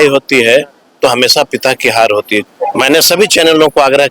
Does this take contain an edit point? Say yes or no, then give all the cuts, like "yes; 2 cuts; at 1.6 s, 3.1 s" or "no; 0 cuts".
yes; 1 cut; at 2.5 s